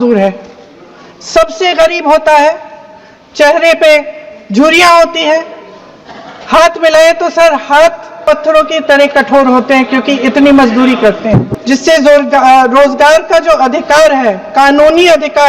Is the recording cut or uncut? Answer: cut